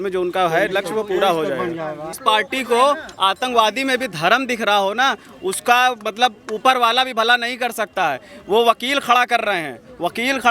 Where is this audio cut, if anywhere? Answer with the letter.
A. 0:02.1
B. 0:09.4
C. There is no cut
A